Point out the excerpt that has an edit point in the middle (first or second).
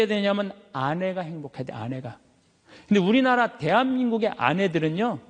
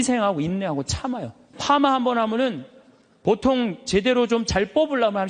second